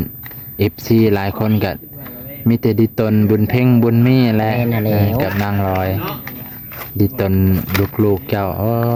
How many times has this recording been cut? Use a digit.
0